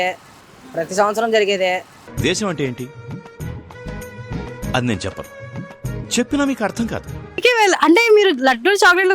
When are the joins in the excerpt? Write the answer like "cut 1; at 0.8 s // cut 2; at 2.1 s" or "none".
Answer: cut 1; at 2.0 s // cut 2; at 7.3 s